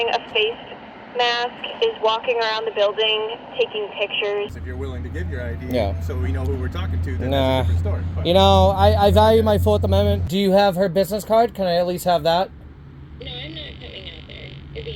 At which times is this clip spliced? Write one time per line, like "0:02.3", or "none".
0:04.5
0:10.2